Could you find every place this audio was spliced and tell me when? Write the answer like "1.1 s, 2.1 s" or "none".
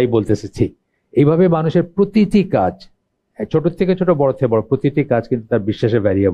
none